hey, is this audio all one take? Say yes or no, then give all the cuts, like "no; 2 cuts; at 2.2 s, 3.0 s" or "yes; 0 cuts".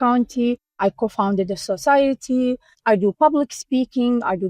no; 2 cuts; at 0.8 s, 2.7 s